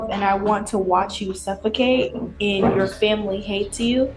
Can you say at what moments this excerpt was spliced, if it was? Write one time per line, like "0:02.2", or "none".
none